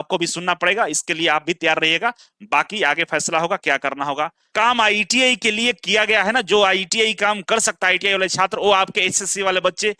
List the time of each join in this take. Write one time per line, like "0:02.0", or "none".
0:04.5